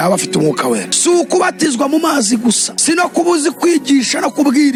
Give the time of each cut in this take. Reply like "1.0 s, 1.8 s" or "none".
none